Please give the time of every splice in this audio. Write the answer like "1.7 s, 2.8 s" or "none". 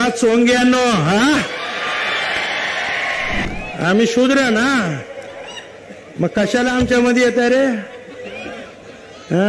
3.4 s